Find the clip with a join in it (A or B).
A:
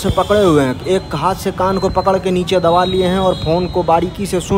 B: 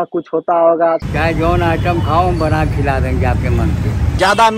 B